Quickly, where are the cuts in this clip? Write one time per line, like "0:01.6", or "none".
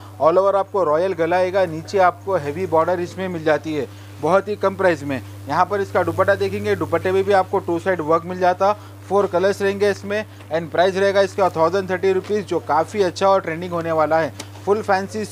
none